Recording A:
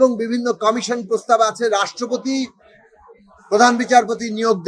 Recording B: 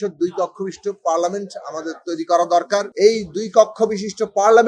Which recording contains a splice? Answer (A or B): B